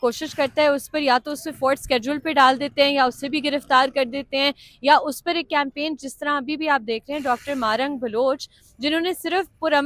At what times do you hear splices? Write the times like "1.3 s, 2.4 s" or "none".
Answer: none